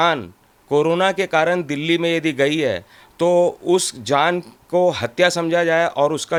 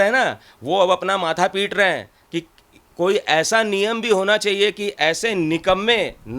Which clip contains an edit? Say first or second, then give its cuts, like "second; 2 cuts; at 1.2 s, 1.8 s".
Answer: second; 1 cut; at 5.0 s